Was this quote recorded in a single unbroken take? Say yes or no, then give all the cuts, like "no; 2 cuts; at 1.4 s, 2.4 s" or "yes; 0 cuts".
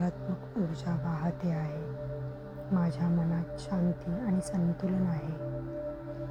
yes; 0 cuts